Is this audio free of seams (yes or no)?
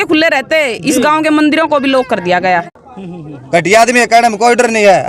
no